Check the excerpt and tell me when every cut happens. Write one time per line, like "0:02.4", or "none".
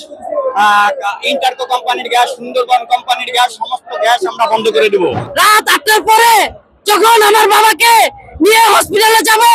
0:05.2